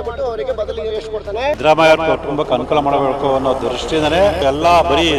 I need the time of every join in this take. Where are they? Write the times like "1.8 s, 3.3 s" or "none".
1.6 s, 4.4 s